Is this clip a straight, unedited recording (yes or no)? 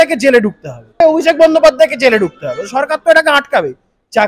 no